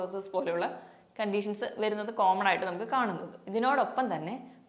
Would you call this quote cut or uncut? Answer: uncut